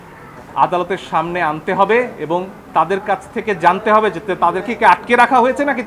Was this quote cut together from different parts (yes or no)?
no